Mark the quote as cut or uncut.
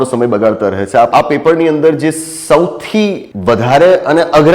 cut